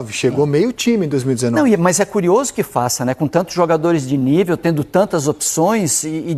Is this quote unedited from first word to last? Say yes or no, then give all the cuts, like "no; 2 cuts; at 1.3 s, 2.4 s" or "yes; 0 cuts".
yes; 0 cuts